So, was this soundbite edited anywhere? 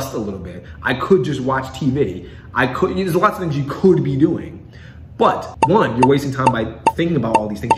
yes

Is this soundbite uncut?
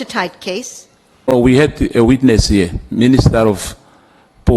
no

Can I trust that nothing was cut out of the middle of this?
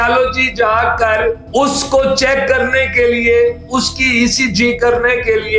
yes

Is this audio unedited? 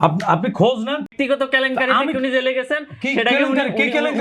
no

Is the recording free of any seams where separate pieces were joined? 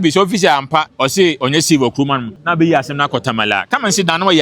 no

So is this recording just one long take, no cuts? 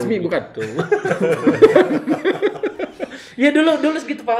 yes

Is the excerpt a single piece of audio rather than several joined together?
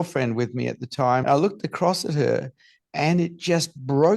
no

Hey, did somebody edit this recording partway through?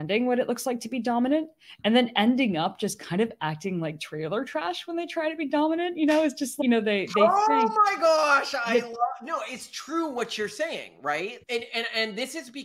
no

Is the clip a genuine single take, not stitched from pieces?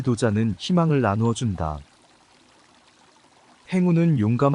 no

